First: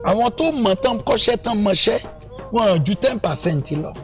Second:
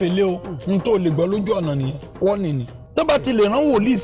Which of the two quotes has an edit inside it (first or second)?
second